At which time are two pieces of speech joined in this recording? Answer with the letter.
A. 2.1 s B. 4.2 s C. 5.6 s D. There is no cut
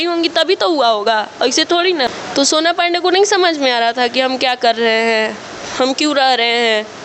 A